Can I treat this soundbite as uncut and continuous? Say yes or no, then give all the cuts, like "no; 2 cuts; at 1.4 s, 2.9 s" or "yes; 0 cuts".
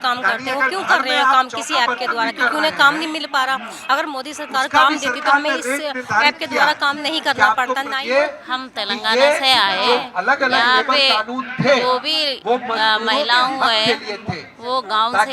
no; 1 cut; at 7.9 s